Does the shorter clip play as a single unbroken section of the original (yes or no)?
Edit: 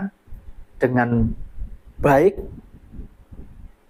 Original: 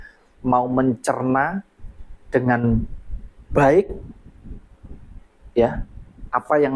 yes